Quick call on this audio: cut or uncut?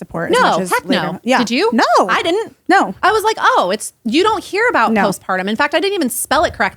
uncut